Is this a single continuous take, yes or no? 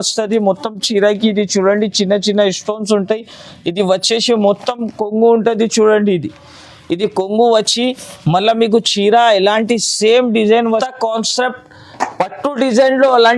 no